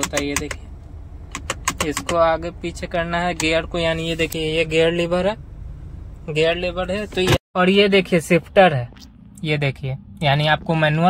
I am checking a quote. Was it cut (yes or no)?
yes